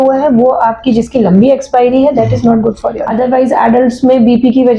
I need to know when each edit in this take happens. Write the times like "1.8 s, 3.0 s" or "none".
3.0 s